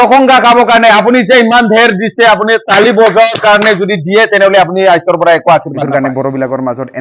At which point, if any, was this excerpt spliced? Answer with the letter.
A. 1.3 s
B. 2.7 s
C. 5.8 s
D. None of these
C